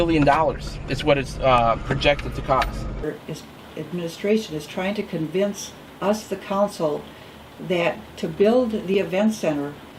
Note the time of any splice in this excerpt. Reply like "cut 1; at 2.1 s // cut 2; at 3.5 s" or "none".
cut 1; at 3.1 s